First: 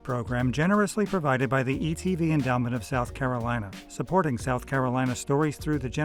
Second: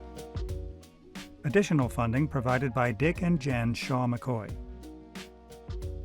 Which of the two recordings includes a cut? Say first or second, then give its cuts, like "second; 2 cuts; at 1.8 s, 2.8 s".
second; 2 cuts; at 1.3 s, 4.5 s